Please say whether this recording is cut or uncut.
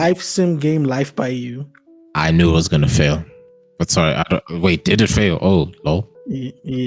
uncut